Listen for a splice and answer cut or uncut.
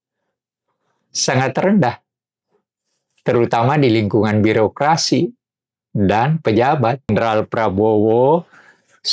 cut